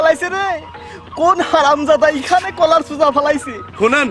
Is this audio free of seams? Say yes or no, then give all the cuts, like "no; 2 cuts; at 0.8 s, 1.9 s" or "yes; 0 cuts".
yes; 0 cuts